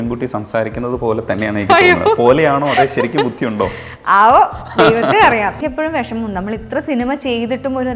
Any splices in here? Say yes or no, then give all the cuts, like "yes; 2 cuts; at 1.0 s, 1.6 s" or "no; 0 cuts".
yes; 1 cut; at 5.6 s